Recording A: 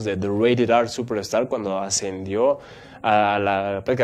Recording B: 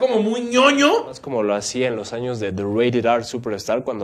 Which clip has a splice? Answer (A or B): B